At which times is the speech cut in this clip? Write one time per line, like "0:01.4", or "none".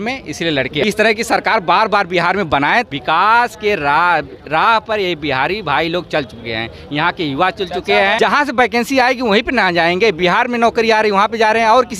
0:00.8
0:02.9
0:08.2